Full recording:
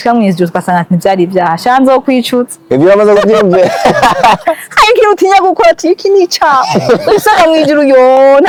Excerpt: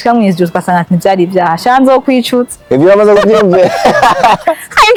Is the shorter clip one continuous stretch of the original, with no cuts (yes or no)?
yes